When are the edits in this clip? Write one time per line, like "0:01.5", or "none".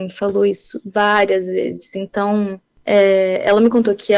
0:02.7

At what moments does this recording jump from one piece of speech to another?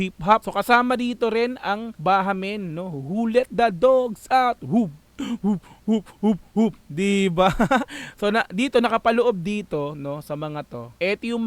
none

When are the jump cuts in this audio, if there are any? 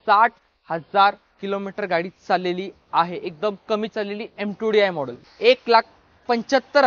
0:05.2

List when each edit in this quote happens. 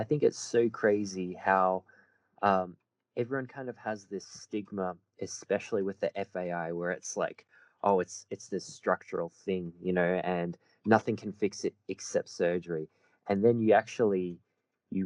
none

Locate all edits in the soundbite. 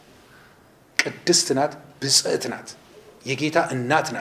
none

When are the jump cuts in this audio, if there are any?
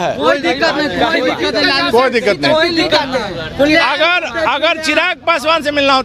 none

